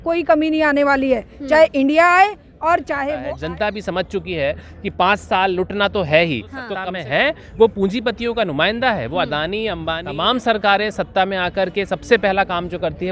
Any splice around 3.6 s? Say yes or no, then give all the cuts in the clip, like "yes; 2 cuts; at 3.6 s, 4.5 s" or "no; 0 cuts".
yes; 3 cuts; at 3.6 s, 6.8 s, 10.2 s